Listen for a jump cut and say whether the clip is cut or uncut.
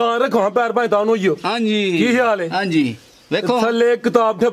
uncut